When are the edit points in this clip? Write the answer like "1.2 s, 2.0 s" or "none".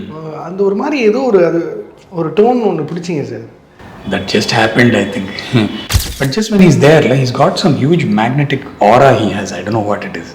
5.9 s